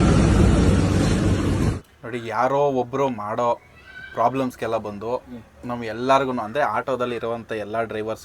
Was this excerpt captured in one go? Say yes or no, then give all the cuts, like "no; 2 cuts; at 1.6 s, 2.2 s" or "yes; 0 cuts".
no; 1 cut; at 1.8 s